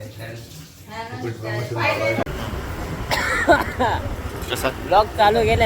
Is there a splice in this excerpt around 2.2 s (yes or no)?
yes